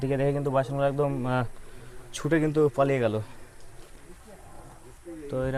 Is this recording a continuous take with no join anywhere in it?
yes; 0 cuts

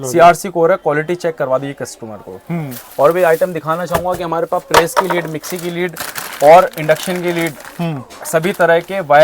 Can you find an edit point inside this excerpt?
no; 0 cuts

